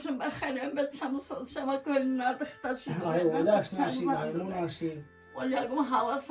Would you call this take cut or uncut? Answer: uncut